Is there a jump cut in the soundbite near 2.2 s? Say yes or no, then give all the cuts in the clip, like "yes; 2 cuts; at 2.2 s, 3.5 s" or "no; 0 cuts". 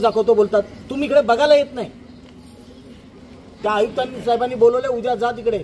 no; 1 cut; at 3.6 s